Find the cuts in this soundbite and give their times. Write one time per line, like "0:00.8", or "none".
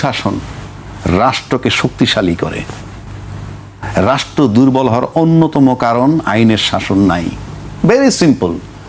none